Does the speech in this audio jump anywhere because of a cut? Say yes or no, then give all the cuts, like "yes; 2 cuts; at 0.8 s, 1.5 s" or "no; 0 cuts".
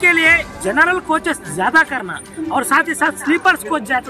no; 0 cuts